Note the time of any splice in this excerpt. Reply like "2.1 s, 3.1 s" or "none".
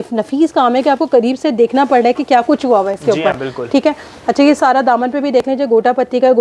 none